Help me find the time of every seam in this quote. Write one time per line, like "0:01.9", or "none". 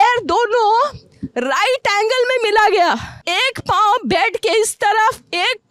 0:03.1